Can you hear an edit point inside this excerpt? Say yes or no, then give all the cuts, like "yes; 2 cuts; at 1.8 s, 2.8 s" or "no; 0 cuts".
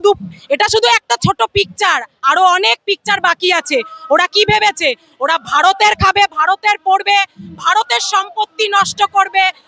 no; 0 cuts